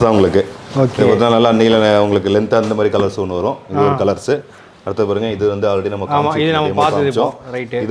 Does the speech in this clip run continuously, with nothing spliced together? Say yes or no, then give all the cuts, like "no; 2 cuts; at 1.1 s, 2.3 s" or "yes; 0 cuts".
yes; 0 cuts